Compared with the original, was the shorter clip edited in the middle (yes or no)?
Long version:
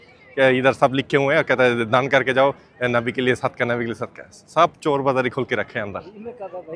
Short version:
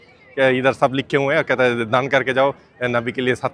no